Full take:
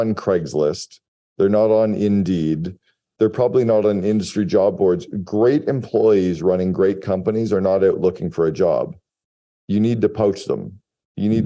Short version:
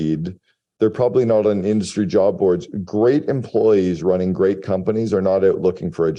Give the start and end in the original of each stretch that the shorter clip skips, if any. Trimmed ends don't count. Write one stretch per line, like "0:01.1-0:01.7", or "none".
none